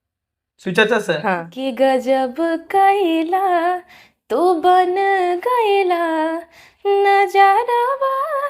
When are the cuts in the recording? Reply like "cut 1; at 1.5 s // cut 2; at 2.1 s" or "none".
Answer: cut 1; at 1.5 s